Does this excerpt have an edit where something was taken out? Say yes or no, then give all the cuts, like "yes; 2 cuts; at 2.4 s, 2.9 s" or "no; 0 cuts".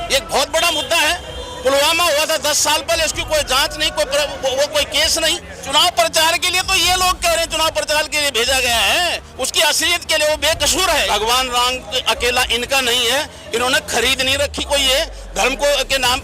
yes; 2 cuts; at 5.5 s, 11.1 s